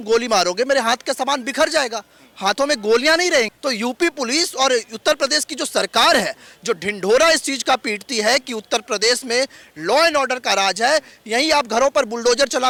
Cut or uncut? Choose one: uncut